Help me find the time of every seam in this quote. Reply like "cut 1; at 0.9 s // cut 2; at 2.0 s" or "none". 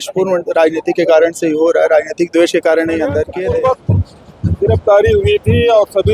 cut 1; at 3.2 s